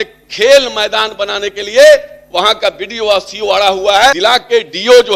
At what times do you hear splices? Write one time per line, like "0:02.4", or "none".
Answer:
0:04.2